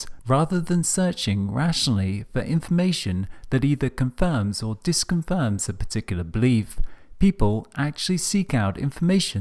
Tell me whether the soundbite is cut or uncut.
uncut